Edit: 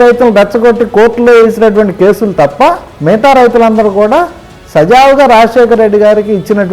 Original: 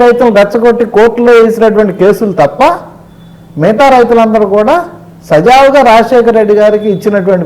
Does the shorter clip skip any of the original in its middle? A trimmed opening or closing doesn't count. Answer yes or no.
yes